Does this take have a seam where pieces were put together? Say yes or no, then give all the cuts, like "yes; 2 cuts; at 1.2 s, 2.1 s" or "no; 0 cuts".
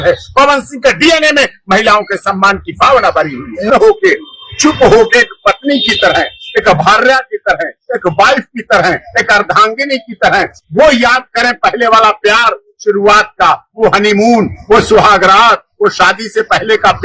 yes; 1 cut; at 3.7 s